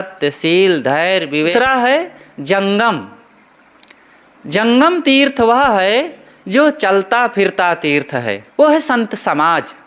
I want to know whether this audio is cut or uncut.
cut